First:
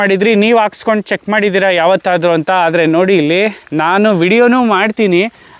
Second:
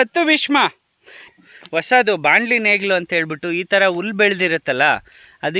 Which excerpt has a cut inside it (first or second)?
second